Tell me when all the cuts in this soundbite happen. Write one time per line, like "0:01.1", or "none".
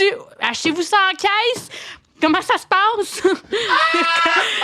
0:03.4